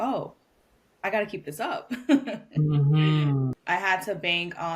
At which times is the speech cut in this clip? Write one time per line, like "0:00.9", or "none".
0:03.6